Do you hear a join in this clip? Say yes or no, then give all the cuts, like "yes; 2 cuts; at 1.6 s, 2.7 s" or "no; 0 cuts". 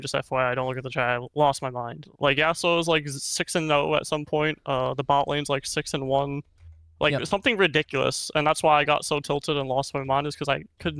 yes; 1 cut; at 2.1 s